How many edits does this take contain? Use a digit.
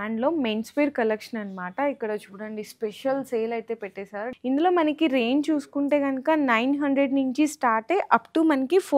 1